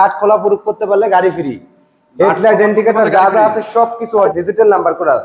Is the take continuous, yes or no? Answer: no